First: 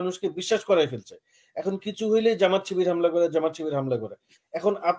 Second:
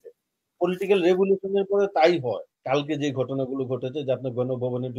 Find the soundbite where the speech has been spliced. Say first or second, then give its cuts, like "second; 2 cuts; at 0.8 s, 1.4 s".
second; 1 cut; at 2.5 s